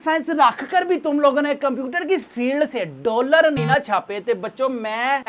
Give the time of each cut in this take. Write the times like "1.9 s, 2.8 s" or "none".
none